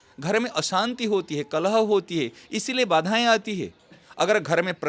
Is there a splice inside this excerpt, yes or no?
no